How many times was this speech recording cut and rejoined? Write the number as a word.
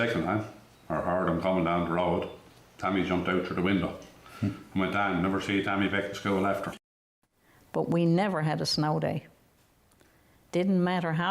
one